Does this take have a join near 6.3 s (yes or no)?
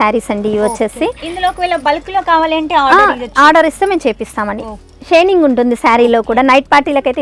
no